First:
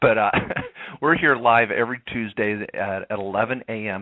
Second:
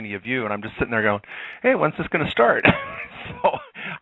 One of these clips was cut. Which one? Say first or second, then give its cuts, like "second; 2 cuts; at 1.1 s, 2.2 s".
first; 1 cut; at 2.7 s